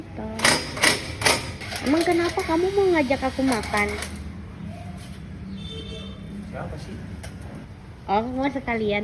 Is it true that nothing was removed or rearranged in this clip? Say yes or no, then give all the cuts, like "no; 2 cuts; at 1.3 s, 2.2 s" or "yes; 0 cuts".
no; 2 cuts; at 1.6 s, 7.7 s